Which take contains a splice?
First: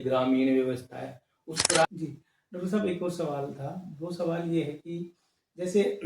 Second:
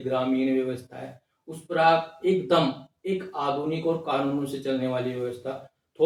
first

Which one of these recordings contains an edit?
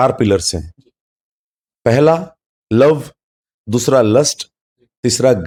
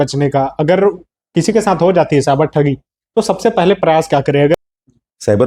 second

